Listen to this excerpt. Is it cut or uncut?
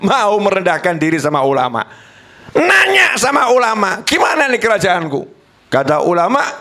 uncut